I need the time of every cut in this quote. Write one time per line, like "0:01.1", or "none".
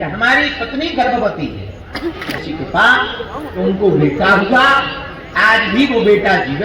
0:02.4